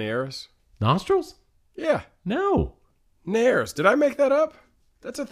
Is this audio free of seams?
yes; 0 cuts

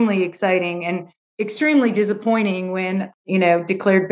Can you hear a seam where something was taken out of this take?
yes; 2 cuts; at 1.2 s, 3.2 s

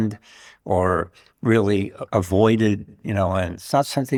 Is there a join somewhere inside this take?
no; 0 cuts

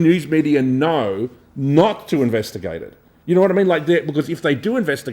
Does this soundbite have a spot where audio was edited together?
no; 0 cuts

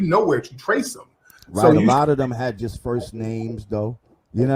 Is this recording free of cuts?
no; 1 cut; at 3.0 s

